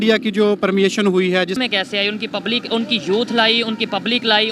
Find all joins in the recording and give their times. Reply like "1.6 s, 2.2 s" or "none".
1.6 s